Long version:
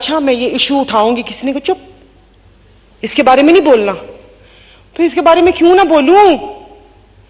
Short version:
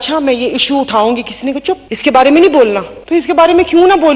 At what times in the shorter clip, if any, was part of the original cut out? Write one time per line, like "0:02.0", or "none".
0:01.9
0:02.9